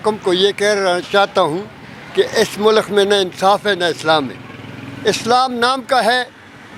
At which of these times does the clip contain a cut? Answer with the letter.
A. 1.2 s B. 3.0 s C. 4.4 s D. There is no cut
D